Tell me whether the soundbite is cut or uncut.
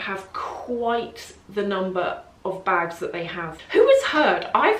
cut